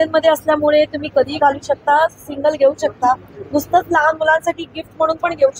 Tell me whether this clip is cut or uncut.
uncut